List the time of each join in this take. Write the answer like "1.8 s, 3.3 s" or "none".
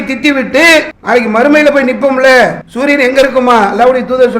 0.9 s, 2.7 s

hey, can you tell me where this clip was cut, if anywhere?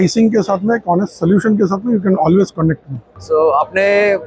3.2 s

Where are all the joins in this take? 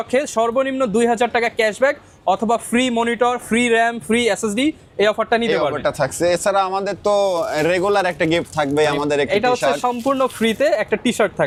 none

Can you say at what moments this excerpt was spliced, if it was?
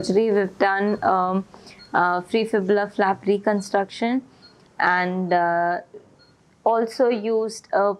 none

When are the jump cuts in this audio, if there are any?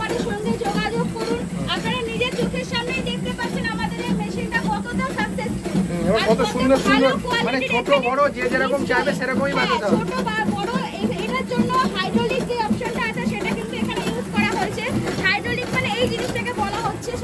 none

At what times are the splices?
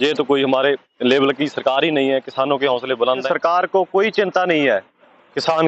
3.2 s

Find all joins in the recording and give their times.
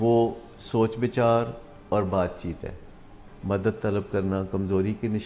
3.2 s

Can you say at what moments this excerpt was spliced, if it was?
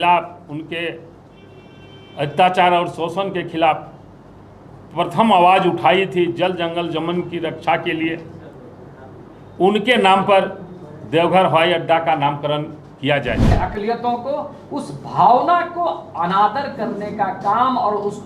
13.6 s

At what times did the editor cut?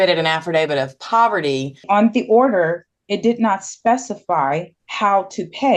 1.8 s, 4.8 s

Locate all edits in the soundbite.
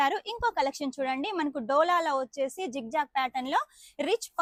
none

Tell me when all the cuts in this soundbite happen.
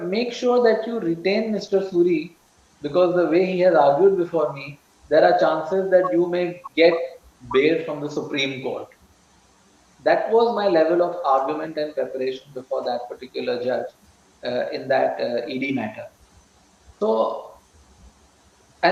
none

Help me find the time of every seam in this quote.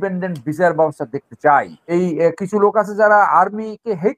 1.8 s

